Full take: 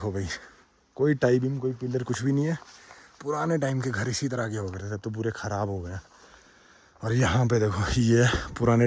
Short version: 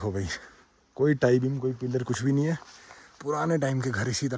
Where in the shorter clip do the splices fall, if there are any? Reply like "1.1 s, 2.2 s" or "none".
none